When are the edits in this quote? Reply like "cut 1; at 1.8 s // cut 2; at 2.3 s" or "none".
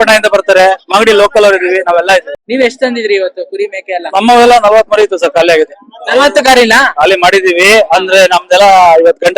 none